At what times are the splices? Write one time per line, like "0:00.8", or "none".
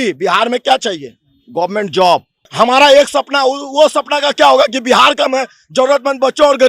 0:02.4